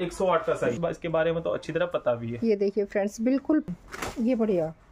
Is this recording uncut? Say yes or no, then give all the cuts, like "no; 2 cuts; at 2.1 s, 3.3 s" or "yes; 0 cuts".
no; 2 cuts; at 0.8 s, 3.7 s